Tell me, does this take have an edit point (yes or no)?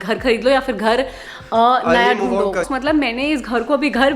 yes